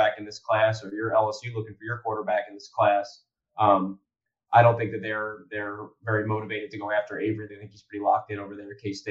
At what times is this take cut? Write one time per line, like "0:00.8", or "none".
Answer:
none